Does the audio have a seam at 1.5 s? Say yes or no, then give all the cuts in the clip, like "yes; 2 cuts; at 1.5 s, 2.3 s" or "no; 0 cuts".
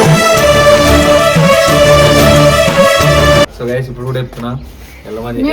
no; 1 cut; at 3.4 s